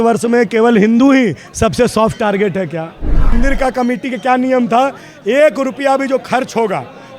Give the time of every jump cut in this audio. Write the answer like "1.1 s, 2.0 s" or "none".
3.3 s